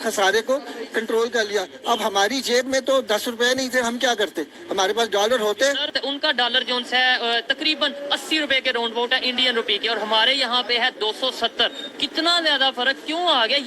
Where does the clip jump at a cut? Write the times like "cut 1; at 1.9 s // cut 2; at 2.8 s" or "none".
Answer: cut 1; at 5.9 s